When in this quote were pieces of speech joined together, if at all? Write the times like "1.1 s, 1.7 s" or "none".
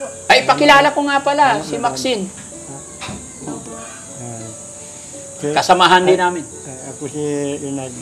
none